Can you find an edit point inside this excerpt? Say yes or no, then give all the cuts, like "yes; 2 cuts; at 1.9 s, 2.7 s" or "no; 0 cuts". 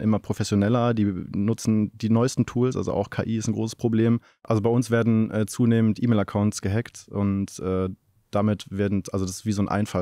yes; 1 cut; at 4.4 s